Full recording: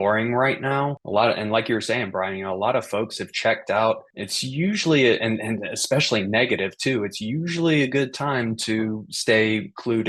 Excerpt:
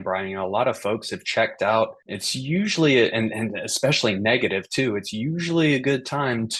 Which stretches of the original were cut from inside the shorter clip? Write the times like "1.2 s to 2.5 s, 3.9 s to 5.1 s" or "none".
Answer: none